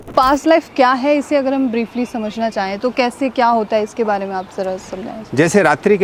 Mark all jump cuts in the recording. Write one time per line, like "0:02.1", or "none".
none